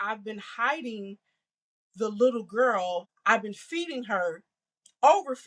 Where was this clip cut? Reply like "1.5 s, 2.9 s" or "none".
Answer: 3.1 s